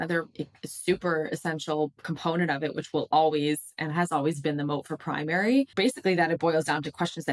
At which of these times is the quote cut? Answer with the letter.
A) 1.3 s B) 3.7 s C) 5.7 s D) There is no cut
C